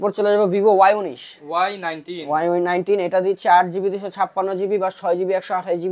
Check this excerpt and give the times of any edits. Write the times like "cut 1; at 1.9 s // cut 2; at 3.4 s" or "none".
none